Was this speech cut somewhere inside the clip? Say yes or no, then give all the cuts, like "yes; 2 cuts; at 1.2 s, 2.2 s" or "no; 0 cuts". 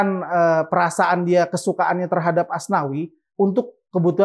no; 0 cuts